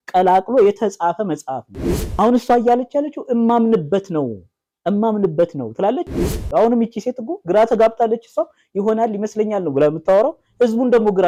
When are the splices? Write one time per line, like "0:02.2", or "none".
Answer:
none